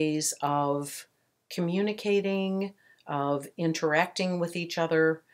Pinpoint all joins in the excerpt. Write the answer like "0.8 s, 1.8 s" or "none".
none